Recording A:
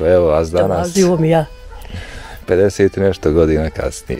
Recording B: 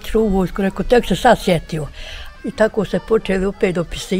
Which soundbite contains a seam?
B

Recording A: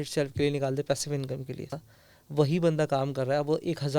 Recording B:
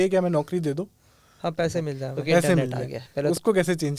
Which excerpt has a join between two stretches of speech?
A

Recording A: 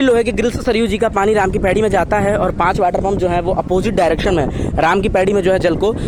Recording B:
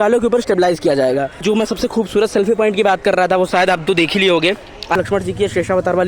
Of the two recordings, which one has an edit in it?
B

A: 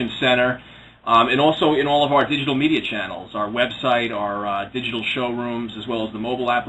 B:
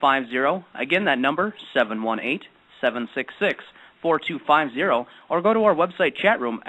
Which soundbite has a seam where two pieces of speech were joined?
B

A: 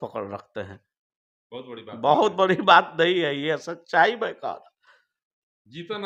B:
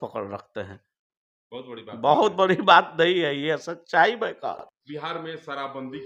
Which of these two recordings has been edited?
B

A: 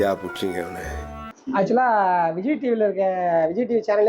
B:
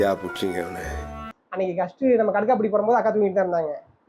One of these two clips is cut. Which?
A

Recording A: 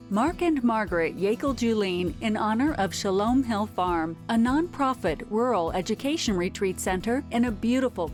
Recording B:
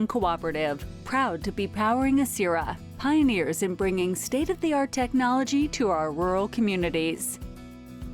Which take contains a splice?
B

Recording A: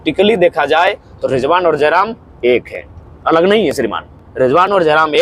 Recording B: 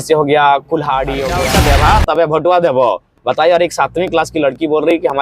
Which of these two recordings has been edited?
B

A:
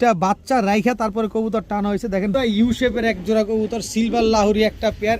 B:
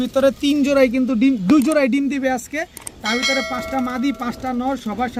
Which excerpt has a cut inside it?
A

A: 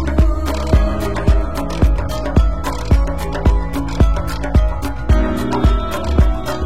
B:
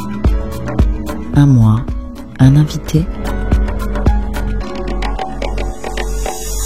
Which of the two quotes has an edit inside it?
B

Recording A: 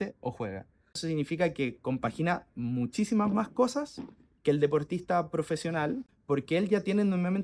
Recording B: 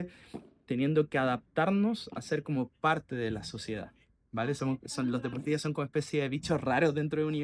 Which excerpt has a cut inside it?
A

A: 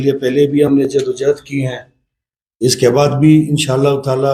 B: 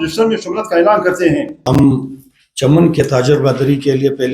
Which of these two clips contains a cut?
B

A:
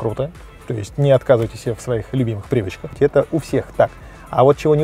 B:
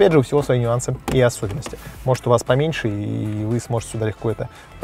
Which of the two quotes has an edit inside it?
A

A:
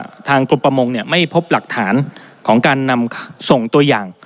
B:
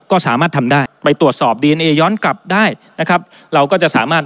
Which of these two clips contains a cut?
B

